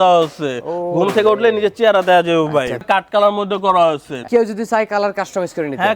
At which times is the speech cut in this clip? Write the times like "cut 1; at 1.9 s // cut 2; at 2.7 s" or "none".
cut 1; at 2.8 s // cut 2; at 4.2 s